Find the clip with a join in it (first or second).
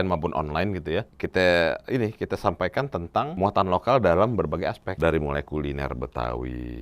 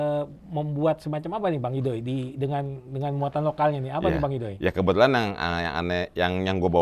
first